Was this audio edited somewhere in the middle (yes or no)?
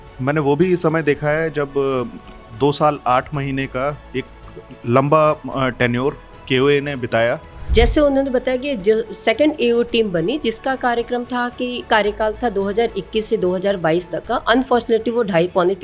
yes